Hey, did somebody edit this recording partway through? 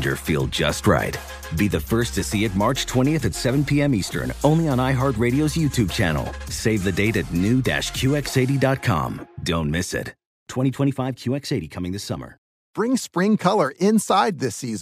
yes; 1 cut; at 12.5 s

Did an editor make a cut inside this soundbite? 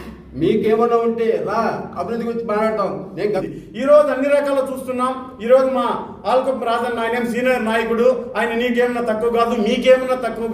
yes; 1 cut; at 3.4 s

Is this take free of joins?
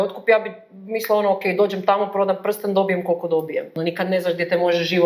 no; 1 cut; at 3.8 s

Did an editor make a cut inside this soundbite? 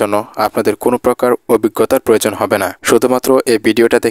yes; 1 cut; at 2.7 s

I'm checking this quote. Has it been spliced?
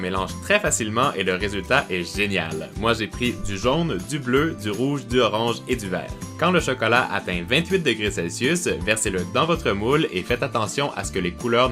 no; 0 cuts

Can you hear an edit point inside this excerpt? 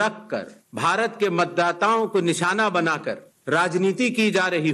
no; 0 cuts

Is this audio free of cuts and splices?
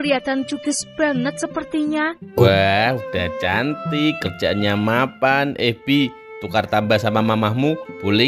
no; 1 cut; at 2.4 s

